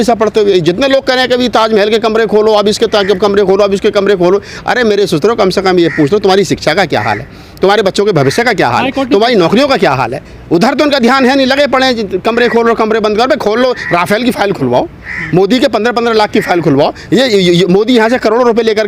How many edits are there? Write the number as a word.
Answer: zero